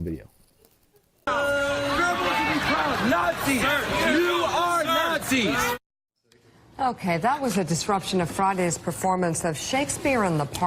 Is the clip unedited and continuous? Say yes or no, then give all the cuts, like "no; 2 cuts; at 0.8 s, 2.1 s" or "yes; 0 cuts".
no; 1 cut; at 3.5 s